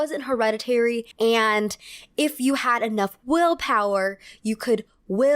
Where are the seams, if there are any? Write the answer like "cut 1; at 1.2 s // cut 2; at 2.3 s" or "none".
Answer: cut 1; at 1.1 s